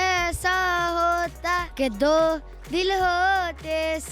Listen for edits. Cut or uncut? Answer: cut